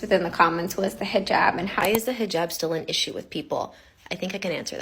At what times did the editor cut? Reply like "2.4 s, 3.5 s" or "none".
1.7 s